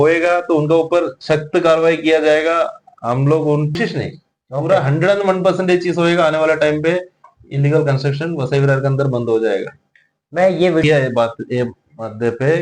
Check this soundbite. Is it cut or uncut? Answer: cut